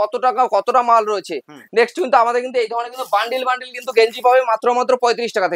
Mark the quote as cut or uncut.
uncut